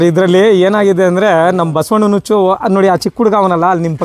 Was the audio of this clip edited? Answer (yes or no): no